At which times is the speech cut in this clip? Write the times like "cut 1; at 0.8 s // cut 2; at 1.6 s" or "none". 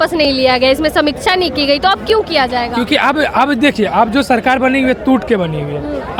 none